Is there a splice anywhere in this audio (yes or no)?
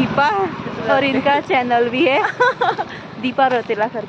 no